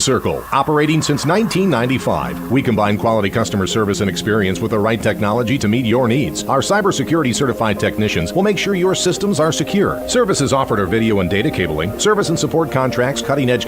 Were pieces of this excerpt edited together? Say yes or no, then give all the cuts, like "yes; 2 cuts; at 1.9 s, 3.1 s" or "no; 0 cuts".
no; 0 cuts